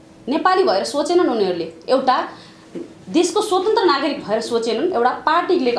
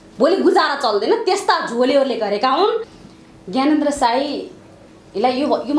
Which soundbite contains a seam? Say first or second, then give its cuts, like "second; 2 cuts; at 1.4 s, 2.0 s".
second; 1 cut; at 3.0 s